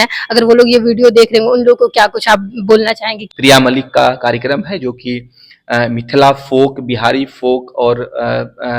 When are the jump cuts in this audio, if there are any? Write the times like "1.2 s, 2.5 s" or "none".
3.1 s